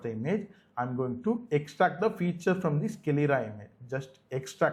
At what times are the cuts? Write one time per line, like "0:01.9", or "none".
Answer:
none